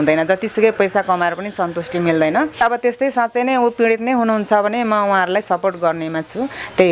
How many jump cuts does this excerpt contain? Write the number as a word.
one